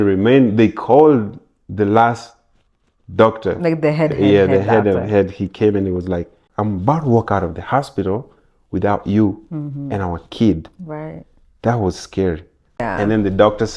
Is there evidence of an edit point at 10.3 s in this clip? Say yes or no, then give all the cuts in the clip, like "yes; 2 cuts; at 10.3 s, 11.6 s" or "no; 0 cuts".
no; 2 cuts; at 6.4 s, 12.8 s